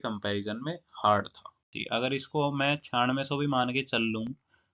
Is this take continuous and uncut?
no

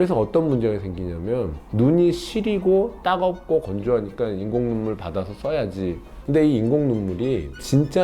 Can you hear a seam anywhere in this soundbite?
yes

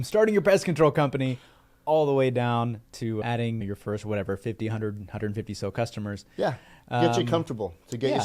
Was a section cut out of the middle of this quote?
yes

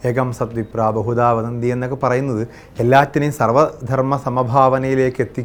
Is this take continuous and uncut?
yes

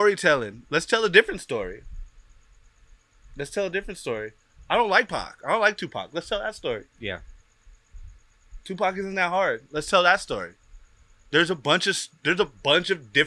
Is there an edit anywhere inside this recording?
no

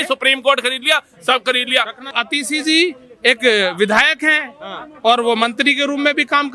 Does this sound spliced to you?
yes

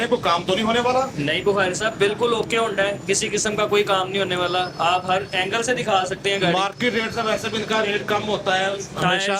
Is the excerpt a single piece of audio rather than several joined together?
yes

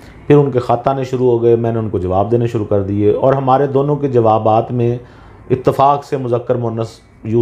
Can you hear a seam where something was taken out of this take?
no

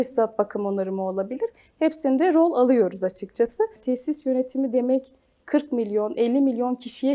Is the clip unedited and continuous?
no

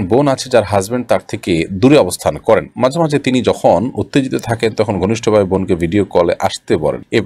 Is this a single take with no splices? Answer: yes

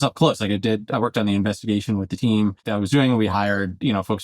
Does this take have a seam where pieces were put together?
yes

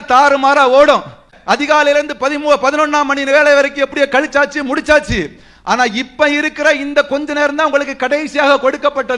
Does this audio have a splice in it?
yes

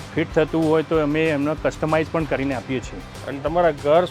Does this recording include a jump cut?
no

